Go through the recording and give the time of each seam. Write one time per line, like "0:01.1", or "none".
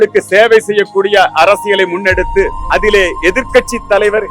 0:02.6